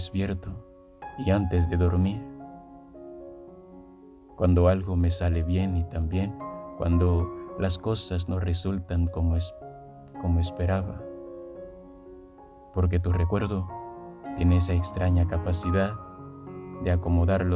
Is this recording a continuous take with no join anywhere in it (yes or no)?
no